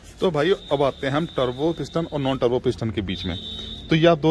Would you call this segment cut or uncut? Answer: uncut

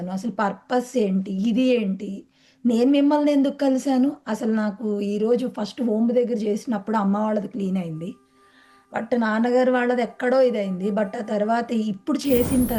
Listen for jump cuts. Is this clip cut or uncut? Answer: uncut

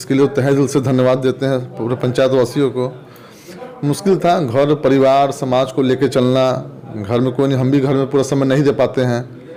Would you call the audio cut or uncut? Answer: uncut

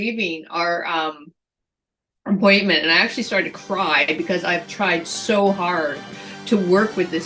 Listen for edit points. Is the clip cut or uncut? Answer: uncut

